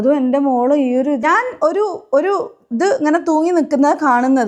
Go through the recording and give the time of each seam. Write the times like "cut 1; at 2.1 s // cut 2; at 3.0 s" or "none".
cut 1; at 1.2 s